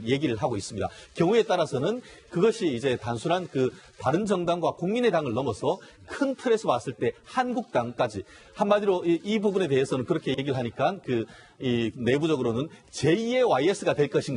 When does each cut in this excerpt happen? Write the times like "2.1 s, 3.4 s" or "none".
1.5 s